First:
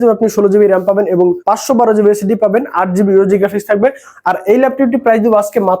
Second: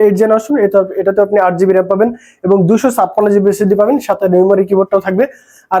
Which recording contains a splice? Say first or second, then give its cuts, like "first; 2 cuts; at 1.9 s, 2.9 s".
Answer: first; 2 cuts; at 1.4 s, 4.1 s